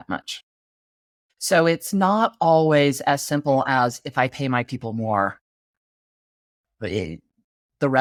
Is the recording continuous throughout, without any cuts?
yes; 0 cuts

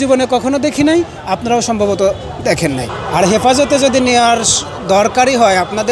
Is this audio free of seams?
no; 1 cut; at 2.9 s

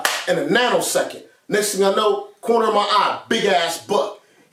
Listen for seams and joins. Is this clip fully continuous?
yes; 0 cuts

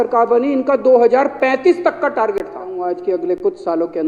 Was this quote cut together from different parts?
yes; 1 cut; at 2.8 s

